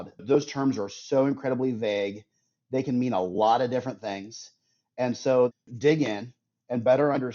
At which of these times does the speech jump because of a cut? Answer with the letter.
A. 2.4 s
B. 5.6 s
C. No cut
B